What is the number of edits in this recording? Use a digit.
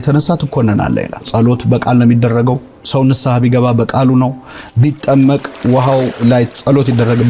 2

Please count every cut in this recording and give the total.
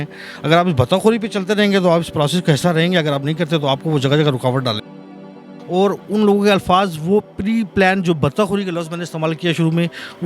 1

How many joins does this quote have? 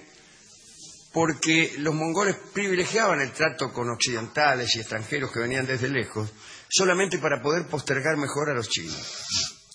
1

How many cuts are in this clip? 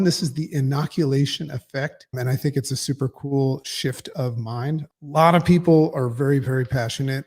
2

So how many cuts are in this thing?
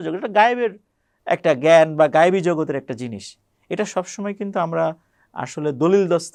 0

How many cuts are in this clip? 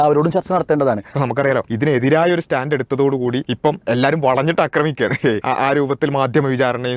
3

